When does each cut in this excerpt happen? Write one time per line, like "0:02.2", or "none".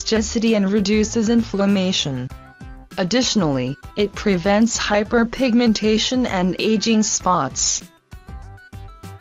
none